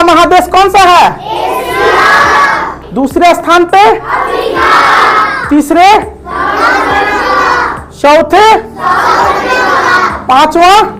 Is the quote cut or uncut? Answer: uncut